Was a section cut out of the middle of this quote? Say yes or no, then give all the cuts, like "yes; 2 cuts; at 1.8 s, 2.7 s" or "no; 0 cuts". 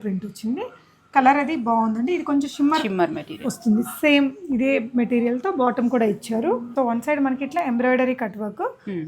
yes; 1 cut; at 6.7 s